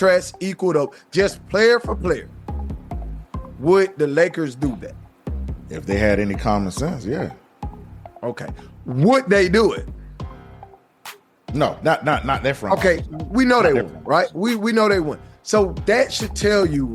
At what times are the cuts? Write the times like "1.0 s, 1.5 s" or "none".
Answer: none